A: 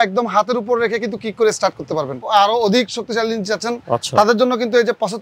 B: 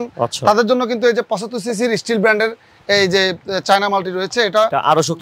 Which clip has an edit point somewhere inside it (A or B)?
A